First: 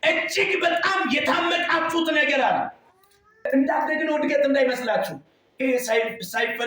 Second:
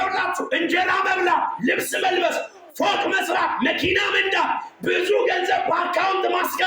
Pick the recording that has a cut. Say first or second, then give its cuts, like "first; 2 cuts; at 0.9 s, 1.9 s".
first; 1 cut; at 3.5 s